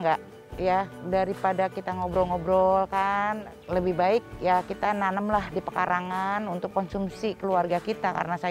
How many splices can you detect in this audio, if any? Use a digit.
2